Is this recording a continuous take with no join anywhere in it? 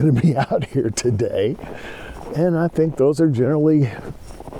yes; 0 cuts

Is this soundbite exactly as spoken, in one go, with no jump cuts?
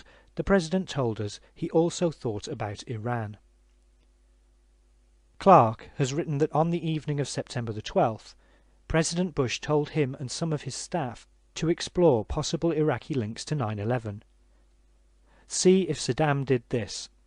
no; 1 cut; at 7.8 s

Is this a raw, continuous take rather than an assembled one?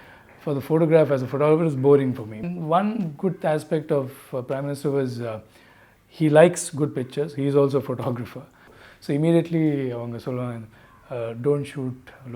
no; 2 cuts; at 2.5 s, 8.8 s

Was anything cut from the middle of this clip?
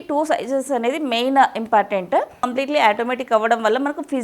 yes; 1 cut; at 2.4 s

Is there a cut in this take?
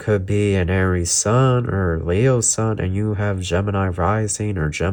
no; 0 cuts

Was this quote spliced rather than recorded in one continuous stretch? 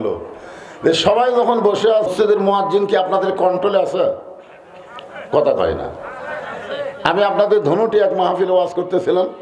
yes; 1 cut; at 2.1 s

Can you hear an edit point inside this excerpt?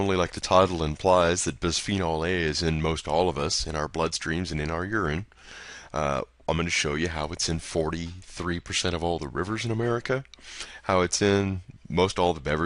yes; 1 cut; at 4.9 s

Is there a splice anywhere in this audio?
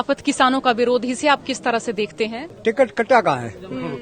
yes; 1 cut; at 2.4 s

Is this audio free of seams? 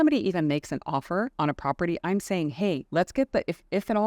no; 2 cuts; at 1.3 s, 2.8 s

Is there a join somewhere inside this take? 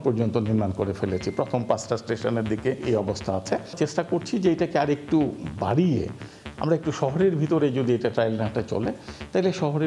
yes; 2 cuts; at 2.8 s, 3.7 s

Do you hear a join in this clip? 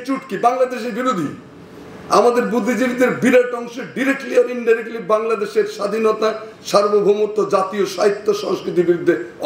no; 0 cuts

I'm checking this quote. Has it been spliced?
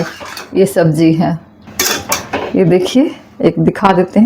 yes; 1 cut; at 1.7 s

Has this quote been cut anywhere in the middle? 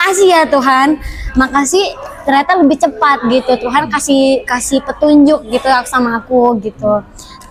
no; 0 cuts

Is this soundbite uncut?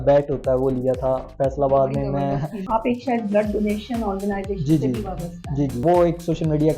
no; 2 cuts; at 2.6 s, 5.8 s

